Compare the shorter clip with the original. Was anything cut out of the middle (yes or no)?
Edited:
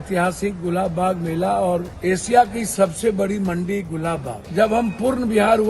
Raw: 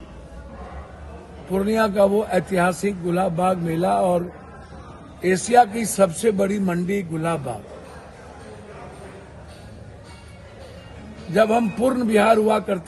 yes